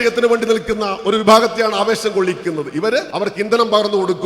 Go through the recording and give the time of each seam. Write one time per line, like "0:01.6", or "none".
0:03.1